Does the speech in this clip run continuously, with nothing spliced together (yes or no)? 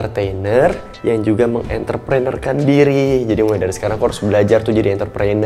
yes